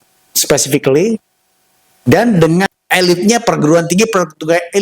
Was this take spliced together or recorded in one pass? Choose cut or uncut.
cut